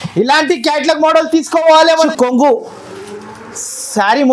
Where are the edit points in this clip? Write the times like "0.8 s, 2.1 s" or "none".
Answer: 2.1 s